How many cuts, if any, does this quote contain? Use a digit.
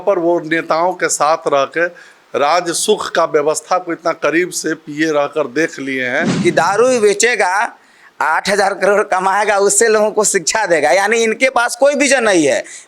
1